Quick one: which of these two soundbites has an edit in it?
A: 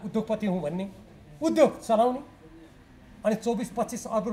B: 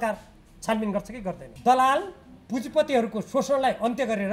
B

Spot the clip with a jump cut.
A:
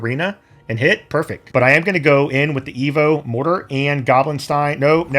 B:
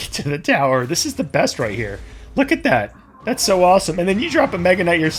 A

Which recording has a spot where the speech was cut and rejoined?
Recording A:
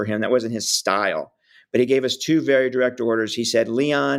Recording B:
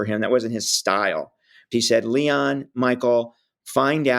B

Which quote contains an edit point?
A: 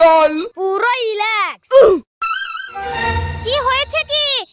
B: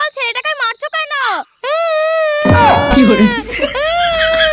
A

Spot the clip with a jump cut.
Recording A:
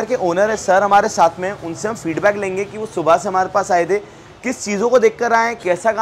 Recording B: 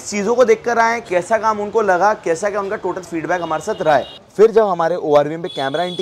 B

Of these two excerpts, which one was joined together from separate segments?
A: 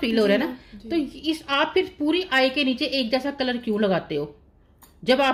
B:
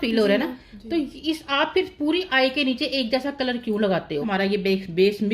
B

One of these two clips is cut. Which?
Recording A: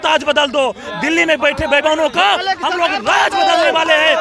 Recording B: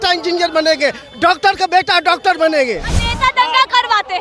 B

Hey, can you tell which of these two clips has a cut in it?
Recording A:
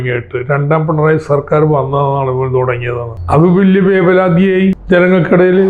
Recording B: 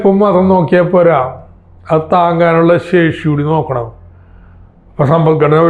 A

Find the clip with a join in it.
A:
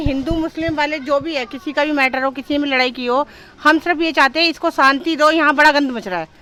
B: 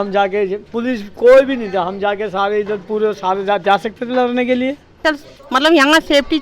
B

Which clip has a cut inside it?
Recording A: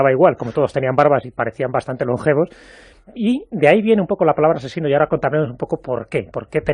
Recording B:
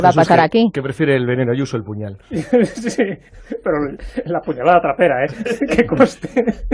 B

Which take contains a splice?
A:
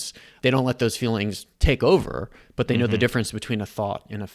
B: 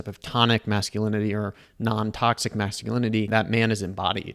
B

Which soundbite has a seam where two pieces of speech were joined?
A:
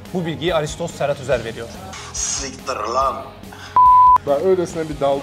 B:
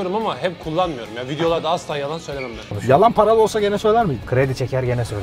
A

